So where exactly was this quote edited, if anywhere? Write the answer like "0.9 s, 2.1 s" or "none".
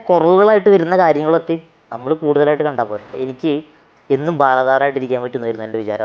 3.1 s